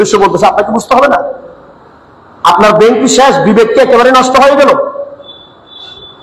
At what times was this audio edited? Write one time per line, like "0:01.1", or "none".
none

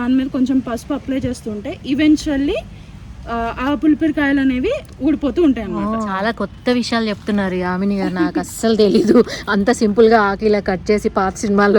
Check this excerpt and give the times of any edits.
0:06.1

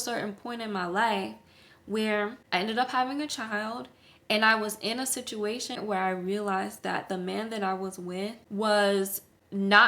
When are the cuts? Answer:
0:02.4
0:05.8
0:08.4

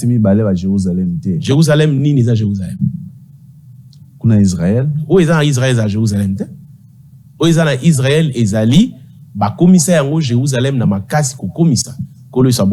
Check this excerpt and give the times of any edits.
none

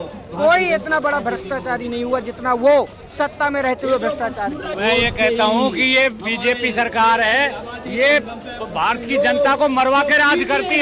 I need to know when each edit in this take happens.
0:04.7

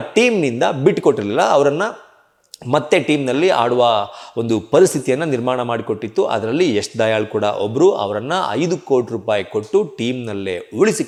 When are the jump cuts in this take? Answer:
none

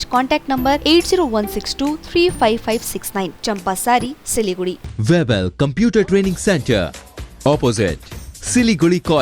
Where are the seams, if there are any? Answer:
0:04.8

